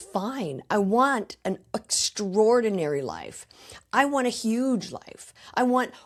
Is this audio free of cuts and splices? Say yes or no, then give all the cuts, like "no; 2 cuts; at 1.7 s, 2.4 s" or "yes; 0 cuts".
yes; 0 cuts